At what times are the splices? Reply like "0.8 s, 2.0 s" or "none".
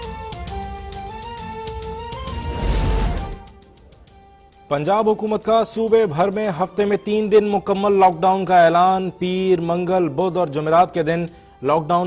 2.1 s